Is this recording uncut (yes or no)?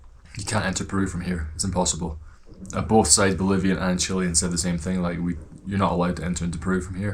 yes